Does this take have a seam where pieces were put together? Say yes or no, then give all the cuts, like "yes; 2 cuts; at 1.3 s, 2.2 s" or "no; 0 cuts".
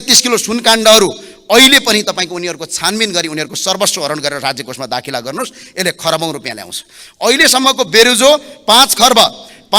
no; 0 cuts